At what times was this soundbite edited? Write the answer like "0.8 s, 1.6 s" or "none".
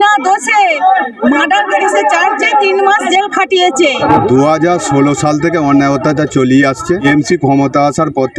4.0 s, 7.0 s